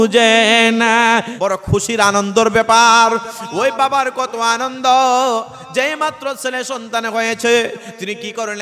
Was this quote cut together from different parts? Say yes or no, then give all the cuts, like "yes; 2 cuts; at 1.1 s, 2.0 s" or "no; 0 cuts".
yes; 1 cut; at 1.3 s